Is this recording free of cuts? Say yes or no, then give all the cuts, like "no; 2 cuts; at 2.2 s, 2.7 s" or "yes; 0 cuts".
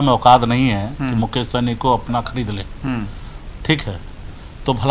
yes; 0 cuts